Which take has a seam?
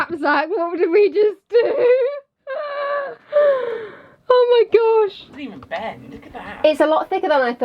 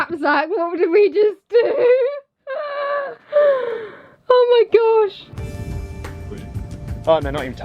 second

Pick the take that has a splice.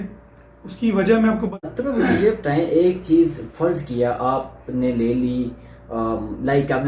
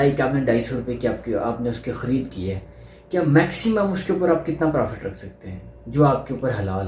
first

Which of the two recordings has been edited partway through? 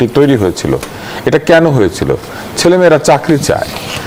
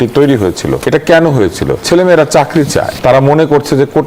second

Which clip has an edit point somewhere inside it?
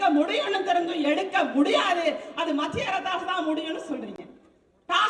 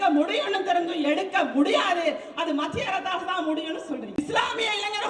second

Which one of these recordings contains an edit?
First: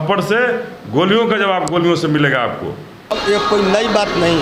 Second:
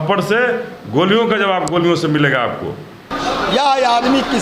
second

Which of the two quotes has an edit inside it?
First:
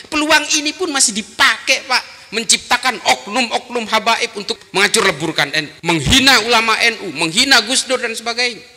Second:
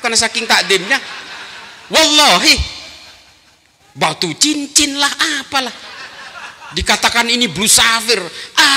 first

